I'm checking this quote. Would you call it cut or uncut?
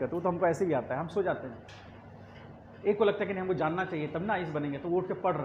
uncut